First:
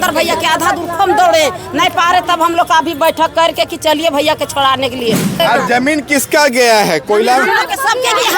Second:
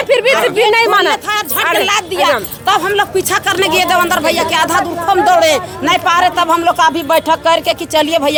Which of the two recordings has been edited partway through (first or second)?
first